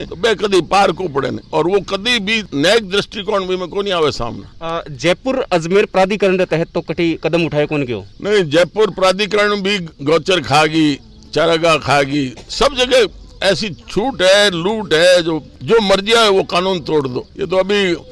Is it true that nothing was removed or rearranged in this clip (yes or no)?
yes